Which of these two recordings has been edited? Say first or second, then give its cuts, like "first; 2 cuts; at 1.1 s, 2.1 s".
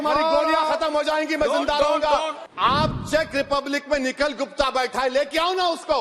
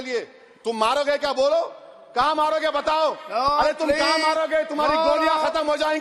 first; 1 cut; at 2.4 s